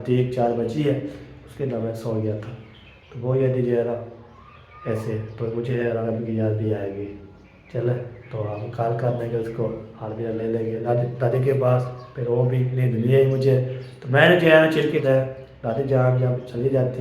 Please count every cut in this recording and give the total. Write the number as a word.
three